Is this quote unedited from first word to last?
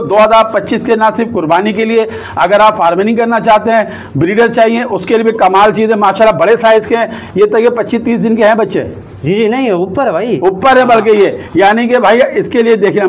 yes; 0 cuts

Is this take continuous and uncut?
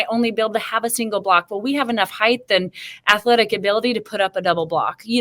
yes; 0 cuts

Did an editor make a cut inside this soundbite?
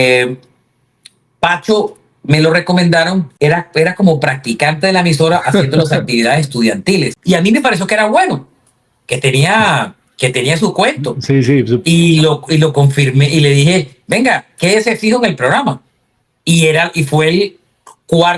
yes; 2 cuts; at 3.3 s, 7.2 s

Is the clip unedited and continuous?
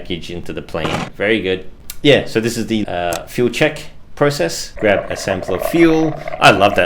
no; 4 cuts; at 0.9 s, 1.8 s, 2.8 s, 4.7 s

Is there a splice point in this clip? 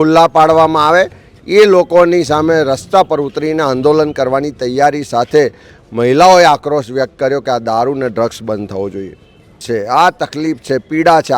yes; 1 cut; at 9.6 s

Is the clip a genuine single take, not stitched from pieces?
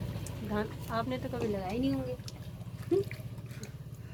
yes; 0 cuts

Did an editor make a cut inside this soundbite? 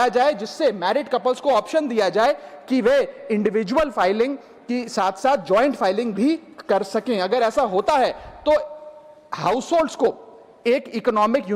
no; 0 cuts

